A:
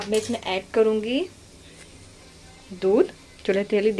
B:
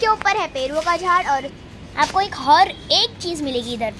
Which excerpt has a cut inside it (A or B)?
B